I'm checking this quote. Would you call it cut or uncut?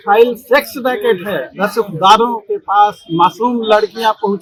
uncut